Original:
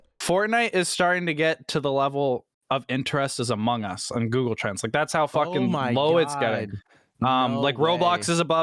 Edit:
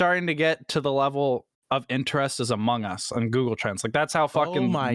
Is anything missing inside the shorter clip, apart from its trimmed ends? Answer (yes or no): no